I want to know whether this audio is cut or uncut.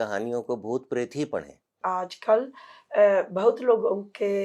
cut